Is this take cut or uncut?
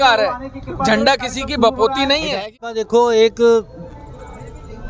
cut